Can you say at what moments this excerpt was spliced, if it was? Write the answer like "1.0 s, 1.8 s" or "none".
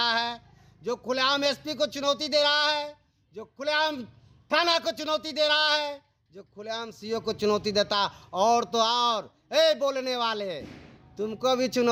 none